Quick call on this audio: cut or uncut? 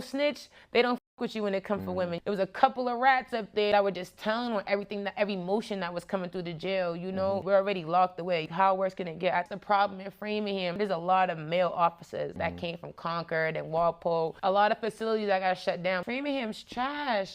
cut